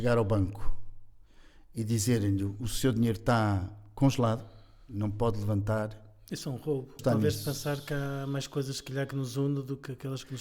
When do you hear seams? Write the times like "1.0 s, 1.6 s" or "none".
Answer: 7.0 s